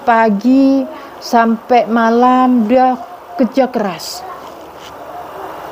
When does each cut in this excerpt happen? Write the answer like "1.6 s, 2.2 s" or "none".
none